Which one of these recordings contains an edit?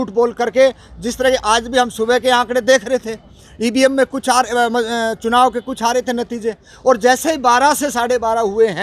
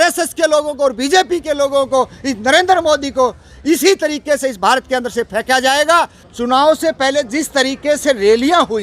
second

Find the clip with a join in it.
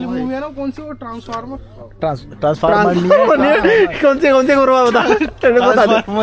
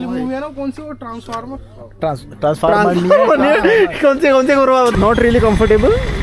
second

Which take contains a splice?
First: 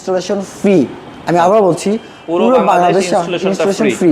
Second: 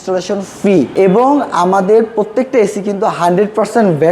second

